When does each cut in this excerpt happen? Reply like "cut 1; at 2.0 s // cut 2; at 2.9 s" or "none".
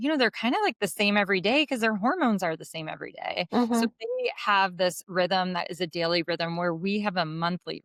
none